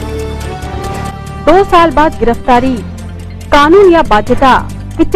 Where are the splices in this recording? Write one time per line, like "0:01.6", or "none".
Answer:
0:01.0

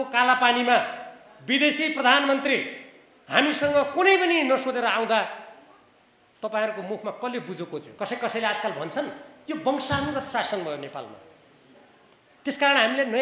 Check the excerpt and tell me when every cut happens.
0:07.9

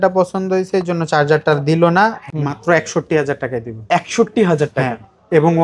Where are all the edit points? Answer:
0:02.3

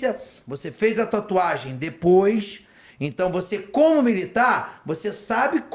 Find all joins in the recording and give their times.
none

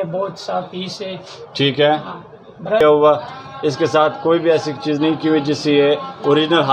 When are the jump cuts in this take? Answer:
0:02.8

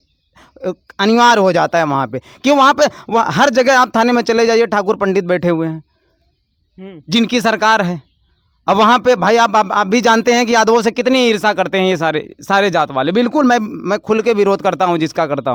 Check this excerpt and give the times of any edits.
none

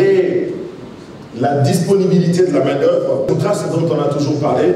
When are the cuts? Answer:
0:03.3

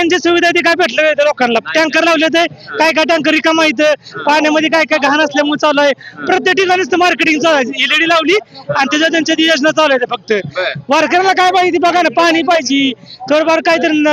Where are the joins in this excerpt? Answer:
none

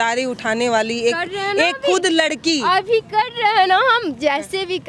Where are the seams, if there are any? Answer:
none

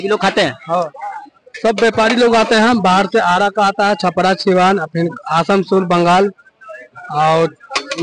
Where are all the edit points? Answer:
0:01.0

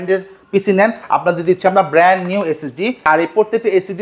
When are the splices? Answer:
0:03.1

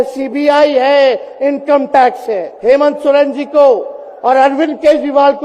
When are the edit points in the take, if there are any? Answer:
0:02.5

